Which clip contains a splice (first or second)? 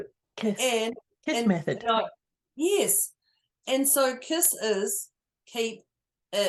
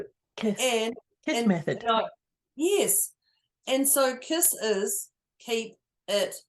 second